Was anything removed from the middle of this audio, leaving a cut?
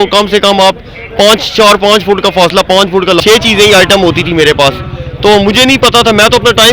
yes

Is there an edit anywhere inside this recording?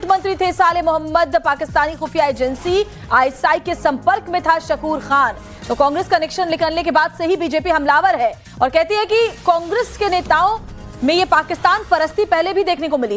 yes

